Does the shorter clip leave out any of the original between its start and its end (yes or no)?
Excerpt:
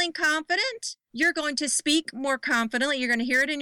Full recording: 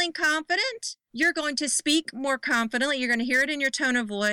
no